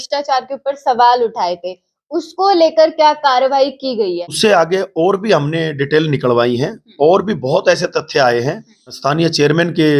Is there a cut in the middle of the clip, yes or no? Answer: yes